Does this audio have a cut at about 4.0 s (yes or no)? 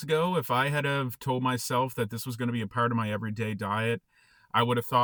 no